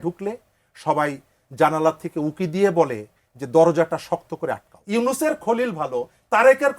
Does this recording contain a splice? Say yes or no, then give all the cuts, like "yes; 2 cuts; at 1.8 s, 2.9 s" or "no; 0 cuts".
yes; 1 cut; at 4.7 s